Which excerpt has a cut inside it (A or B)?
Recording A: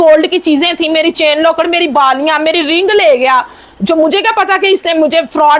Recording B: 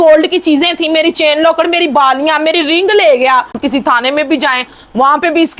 B